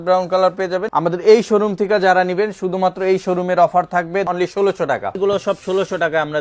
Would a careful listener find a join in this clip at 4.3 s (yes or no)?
yes